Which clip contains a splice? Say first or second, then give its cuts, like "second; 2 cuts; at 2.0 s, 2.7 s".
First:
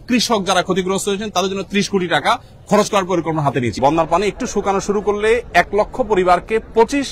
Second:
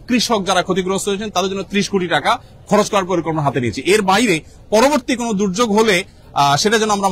first; 1 cut; at 3.8 s